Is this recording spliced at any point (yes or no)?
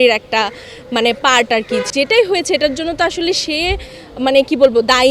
yes